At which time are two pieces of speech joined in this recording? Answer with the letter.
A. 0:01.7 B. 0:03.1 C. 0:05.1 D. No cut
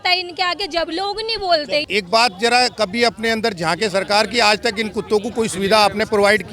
D